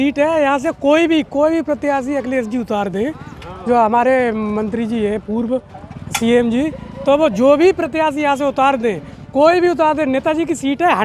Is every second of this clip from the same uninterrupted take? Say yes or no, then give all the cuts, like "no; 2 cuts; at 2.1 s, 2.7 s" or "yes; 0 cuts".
yes; 0 cuts